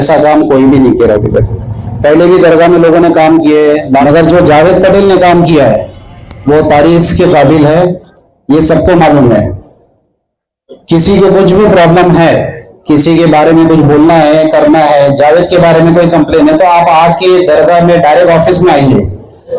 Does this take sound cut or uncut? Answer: cut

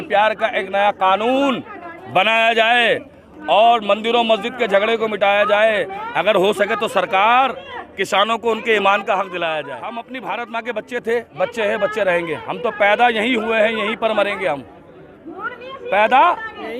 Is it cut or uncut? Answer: cut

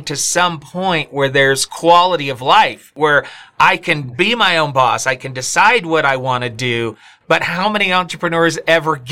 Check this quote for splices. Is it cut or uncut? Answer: cut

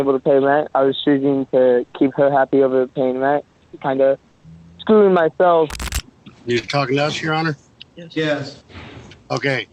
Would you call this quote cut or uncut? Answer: cut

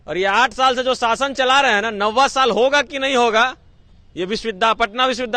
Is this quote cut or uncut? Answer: uncut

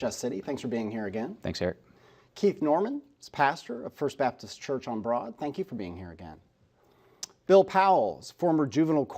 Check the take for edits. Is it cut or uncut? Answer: cut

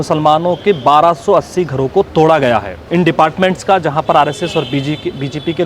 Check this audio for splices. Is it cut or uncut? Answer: cut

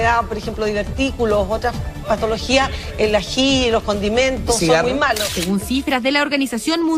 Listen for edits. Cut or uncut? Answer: cut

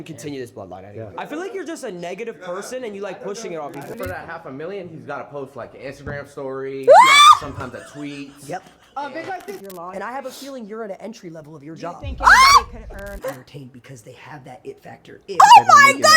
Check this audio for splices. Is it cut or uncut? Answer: cut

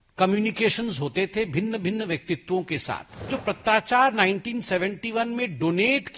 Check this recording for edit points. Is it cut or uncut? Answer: cut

